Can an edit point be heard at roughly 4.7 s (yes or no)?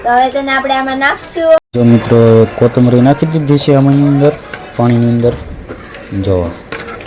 no